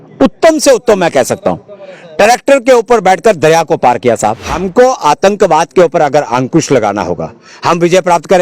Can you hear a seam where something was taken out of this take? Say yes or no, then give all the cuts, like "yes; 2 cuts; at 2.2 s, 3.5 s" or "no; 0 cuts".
yes; 1 cut; at 4.5 s